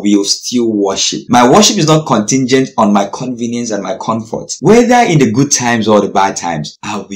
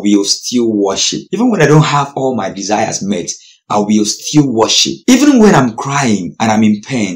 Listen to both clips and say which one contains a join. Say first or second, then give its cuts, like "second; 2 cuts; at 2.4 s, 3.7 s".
first; 2 cuts; at 1.1 s, 4.5 s